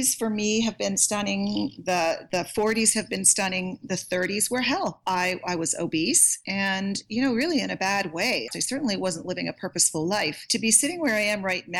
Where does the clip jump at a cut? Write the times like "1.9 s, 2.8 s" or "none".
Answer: 6.3 s, 8.5 s, 10.4 s